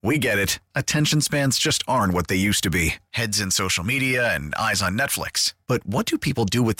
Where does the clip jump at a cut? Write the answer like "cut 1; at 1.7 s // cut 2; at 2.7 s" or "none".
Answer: none